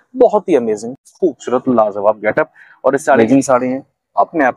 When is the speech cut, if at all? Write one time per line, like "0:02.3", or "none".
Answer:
0:03.0